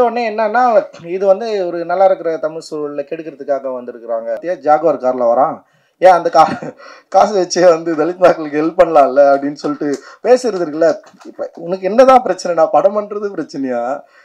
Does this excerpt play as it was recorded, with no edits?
no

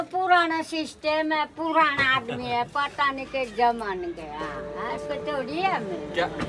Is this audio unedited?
yes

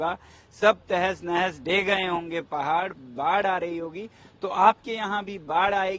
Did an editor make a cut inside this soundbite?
no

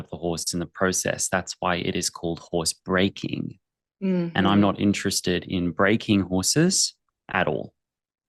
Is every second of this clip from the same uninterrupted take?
yes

